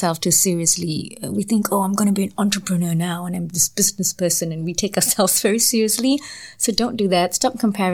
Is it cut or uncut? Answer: uncut